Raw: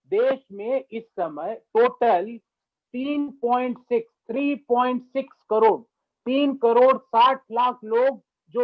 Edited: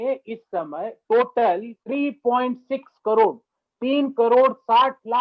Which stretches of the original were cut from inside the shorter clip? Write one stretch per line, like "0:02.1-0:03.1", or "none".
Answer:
0:02.4-0:04.2